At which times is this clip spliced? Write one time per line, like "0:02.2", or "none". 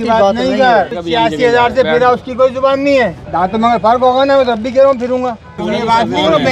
0:00.9
0:03.2
0:05.5